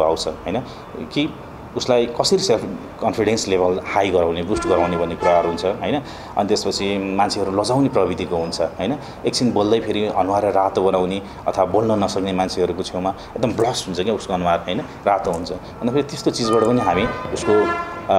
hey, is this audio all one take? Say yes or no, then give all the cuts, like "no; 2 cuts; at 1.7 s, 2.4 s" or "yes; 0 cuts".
yes; 0 cuts